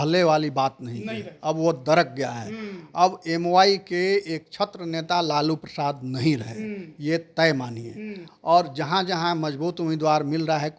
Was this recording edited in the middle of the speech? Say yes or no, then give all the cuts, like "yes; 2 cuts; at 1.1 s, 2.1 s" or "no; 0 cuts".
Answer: no; 0 cuts